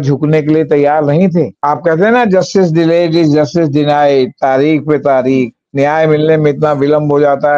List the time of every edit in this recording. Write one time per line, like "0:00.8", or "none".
0:01.6